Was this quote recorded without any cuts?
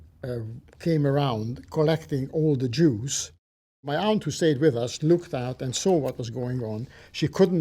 no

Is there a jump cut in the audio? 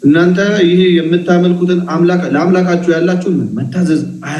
no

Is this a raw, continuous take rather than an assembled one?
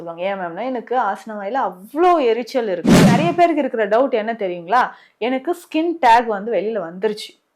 no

